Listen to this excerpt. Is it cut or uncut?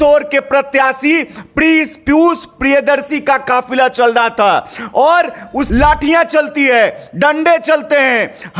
cut